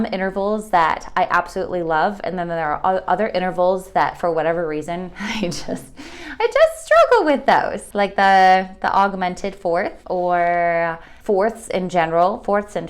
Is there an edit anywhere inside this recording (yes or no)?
yes